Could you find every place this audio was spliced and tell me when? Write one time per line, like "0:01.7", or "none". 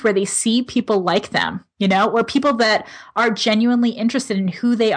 none